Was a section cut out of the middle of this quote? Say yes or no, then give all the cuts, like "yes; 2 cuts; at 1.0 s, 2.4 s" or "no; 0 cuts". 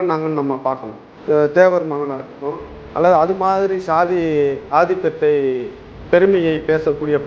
yes; 1 cut; at 1.1 s